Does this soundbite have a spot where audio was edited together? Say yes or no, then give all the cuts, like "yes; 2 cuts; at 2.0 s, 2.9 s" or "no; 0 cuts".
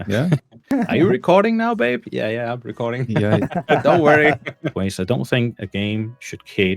yes; 1 cut; at 4.7 s